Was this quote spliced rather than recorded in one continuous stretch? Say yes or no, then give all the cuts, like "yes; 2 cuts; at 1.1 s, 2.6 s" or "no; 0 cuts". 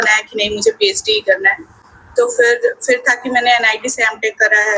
no; 0 cuts